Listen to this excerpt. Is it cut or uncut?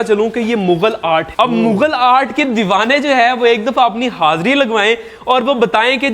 cut